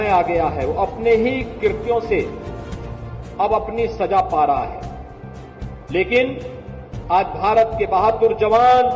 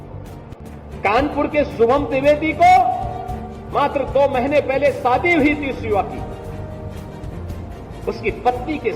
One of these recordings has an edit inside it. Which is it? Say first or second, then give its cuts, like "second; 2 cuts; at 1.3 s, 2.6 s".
second; 2 cuts; at 6.2 s, 8.0 s